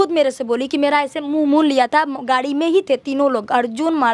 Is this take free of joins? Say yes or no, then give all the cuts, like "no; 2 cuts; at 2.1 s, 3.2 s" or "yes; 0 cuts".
yes; 0 cuts